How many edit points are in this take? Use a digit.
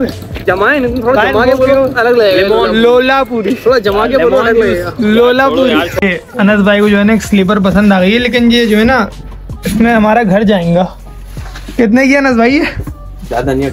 1